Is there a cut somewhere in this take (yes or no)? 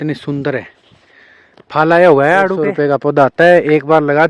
yes